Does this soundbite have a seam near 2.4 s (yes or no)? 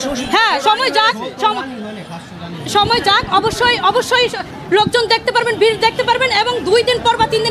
no